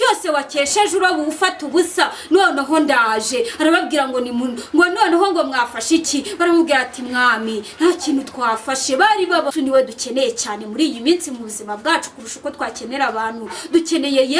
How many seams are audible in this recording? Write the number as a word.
one